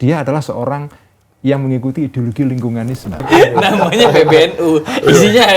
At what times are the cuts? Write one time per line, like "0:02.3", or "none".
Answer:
0:03.2